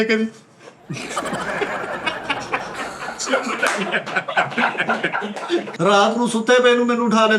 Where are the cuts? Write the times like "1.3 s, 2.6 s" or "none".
5.7 s

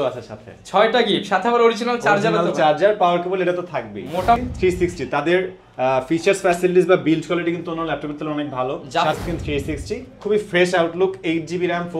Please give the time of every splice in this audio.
4.4 s, 9.1 s

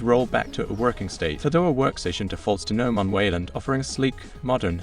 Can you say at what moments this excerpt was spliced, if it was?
1.4 s

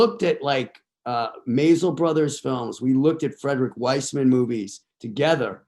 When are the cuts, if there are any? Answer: none

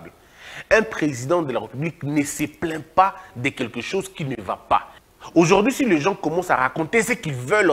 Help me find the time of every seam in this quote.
4.9 s

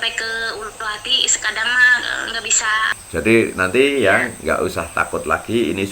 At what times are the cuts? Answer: 3.0 s

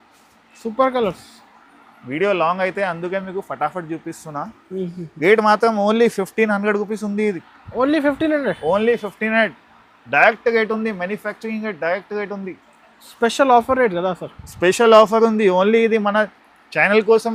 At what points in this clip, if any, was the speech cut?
none

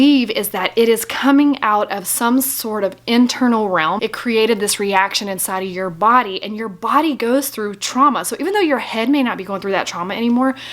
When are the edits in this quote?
4.0 s

